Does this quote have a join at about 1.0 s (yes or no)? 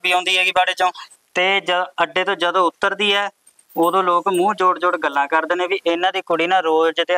yes